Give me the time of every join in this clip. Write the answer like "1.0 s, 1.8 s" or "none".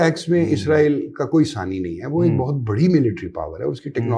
none